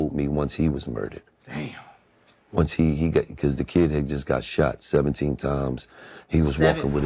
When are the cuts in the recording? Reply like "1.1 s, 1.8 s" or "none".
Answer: none